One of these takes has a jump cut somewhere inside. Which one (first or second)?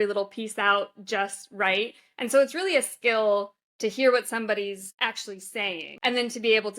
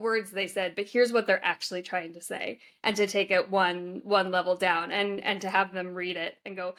first